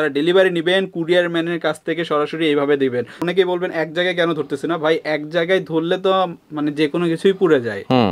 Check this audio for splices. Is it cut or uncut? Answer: uncut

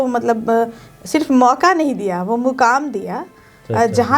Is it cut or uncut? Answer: uncut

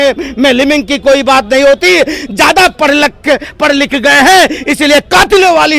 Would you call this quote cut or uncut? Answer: uncut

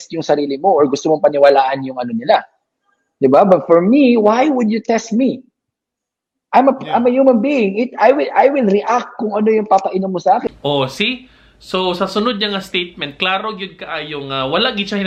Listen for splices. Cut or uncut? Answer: uncut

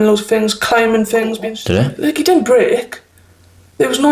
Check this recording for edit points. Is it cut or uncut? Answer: cut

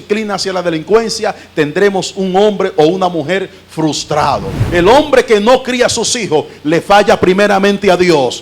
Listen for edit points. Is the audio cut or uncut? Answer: cut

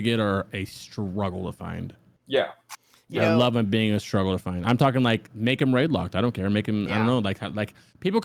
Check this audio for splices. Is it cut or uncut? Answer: uncut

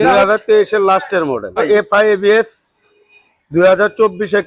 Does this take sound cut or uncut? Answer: cut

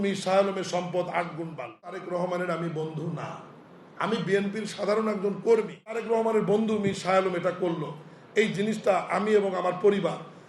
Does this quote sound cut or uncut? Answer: cut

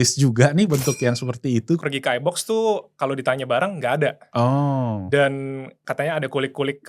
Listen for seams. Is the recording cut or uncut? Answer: cut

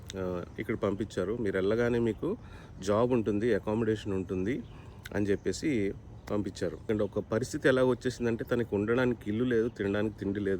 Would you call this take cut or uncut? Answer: cut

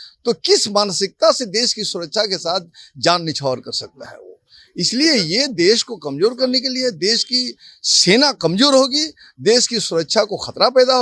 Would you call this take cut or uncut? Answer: uncut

